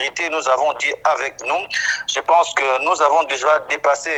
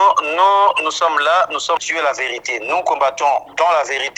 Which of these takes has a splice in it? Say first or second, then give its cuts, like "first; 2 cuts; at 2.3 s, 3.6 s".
second; 1 cut; at 1.9 s